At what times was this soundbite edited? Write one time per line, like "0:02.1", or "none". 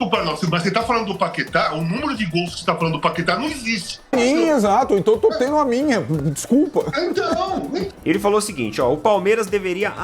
0:04.1
0:07.8